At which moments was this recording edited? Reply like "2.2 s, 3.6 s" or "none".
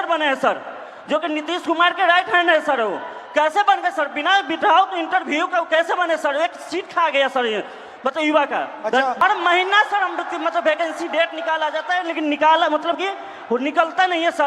9.2 s